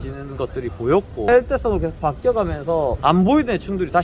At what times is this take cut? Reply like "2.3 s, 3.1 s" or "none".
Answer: 1.3 s, 3.0 s